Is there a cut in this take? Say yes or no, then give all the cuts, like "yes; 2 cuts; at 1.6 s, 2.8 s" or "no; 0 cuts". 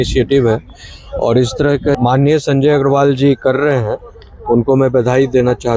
yes; 1 cut; at 2.0 s